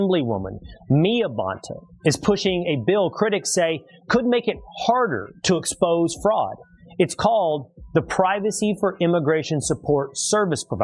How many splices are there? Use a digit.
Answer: 0